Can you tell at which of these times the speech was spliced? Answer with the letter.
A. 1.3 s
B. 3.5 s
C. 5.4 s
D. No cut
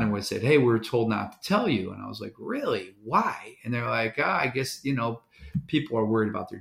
D